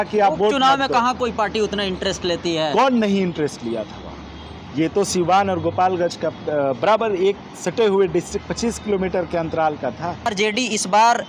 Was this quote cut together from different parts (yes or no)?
yes